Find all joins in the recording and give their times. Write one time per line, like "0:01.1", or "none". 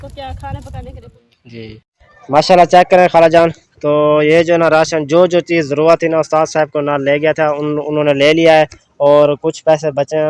0:01.0

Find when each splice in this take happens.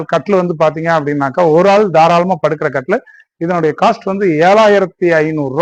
none

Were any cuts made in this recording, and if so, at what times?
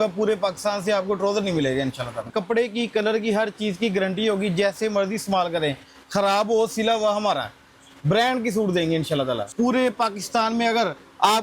0:02.3
0:09.5

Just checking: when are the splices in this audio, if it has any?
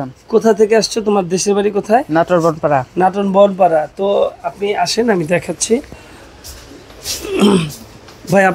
none

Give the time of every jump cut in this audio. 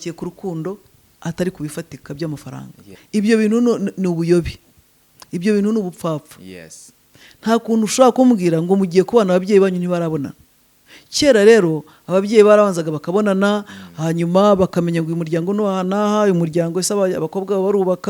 0:02.9

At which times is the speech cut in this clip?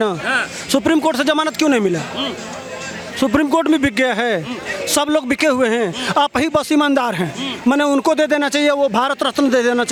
none

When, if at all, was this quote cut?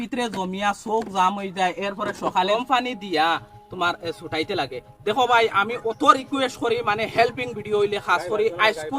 0:02.5

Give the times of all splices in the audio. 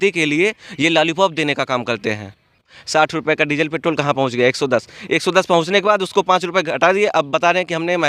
0:02.7

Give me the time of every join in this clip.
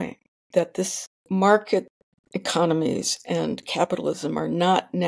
0:01.1

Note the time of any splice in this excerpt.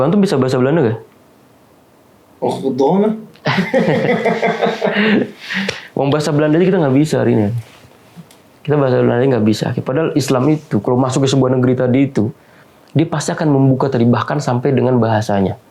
none

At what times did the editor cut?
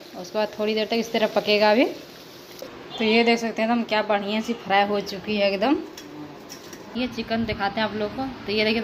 0:02.8
0:06.9

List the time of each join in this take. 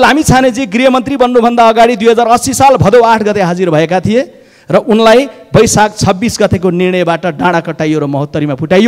none

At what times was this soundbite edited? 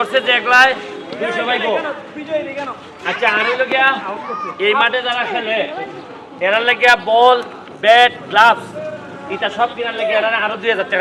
none

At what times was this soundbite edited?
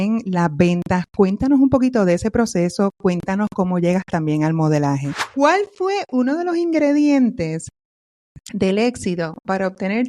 0:05.2

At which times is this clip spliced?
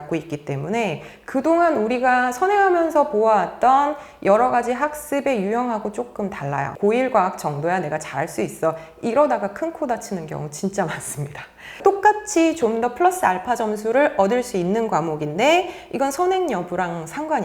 0:06.7
0:11.8

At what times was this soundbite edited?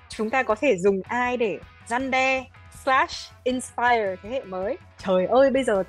0:04.9

